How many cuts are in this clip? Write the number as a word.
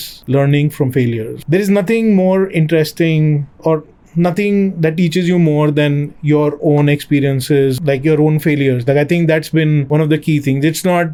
zero